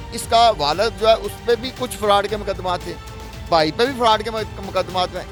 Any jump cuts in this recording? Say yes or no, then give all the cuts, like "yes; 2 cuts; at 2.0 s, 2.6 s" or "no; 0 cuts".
no; 0 cuts